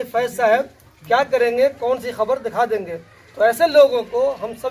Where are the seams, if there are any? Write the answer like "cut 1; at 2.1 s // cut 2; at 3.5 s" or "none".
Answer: none